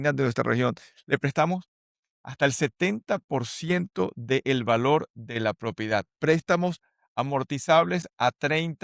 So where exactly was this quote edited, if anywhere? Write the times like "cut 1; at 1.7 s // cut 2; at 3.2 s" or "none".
none